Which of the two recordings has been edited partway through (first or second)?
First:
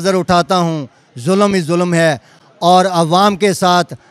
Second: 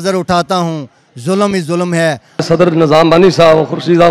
second